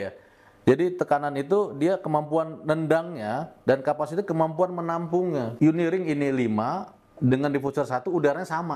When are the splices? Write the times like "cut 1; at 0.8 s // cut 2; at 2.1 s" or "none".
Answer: cut 1; at 5.5 s